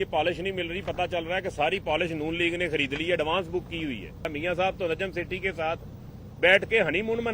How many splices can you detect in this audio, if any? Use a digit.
1